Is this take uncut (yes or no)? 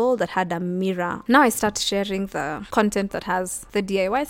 no